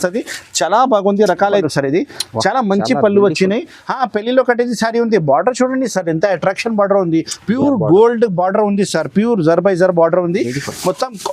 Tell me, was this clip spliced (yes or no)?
yes